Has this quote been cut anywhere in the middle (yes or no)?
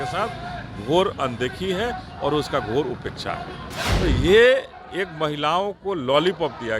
yes